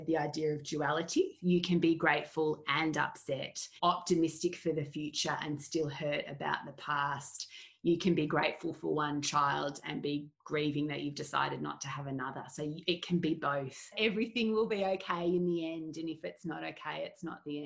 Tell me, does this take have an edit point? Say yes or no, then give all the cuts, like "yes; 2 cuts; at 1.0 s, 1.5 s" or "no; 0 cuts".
yes; 4 cuts; at 1.3 s, 3.7 s, 10.4 s, 13.9 s